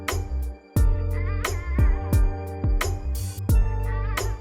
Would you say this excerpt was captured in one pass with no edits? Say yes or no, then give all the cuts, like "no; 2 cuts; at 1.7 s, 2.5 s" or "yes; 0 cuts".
yes; 0 cuts